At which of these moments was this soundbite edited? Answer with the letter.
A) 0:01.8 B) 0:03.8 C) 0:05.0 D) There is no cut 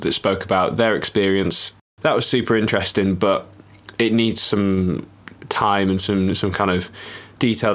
A